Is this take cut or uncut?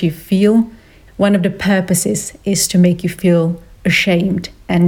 uncut